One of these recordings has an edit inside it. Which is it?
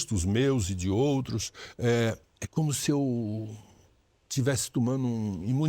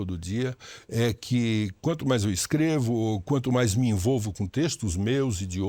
first; 1 cut; at 2.3 s

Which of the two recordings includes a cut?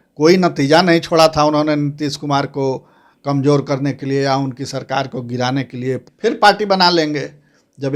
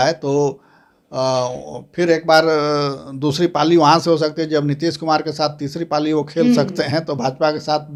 first; 1 cut; at 6.1 s

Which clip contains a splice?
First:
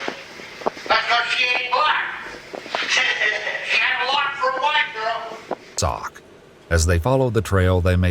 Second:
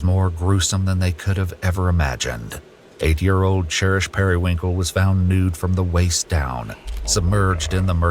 first; 1 cut; at 5.7 s

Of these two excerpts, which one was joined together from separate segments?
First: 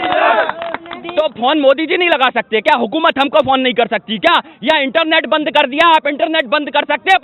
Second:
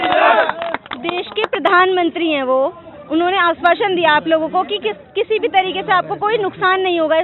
first; 1 cut; at 1.0 s

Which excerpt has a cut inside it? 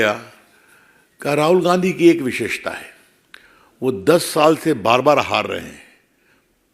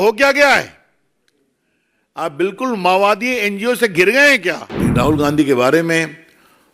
second; 1 cut; at 4.7 s

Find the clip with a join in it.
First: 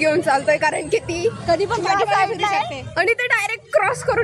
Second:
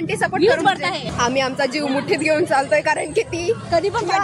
second; 1 cut; at 1.0 s

